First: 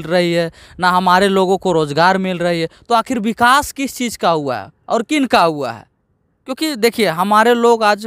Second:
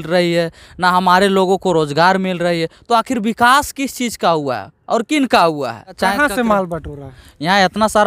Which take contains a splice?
second; 1 cut; at 6.0 s

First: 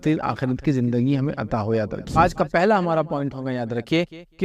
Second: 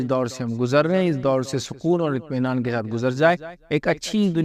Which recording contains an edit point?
first; 1 cut; at 2.1 s

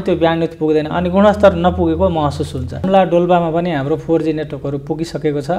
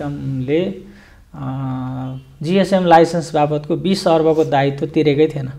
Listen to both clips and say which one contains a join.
first; 1 cut; at 2.7 s

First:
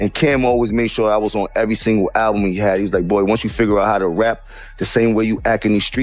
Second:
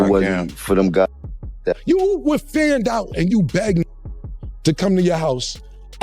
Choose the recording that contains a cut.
second; 1 cut; at 1.6 s

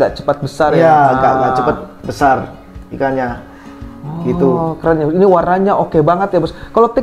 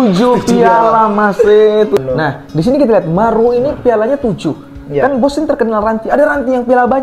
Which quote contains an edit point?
second; 1 cut; at 2.0 s

